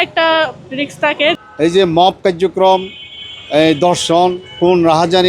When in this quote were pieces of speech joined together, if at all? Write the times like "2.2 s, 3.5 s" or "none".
1.4 s